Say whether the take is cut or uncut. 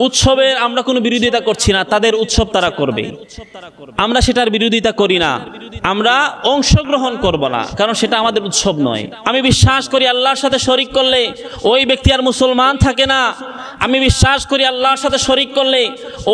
cut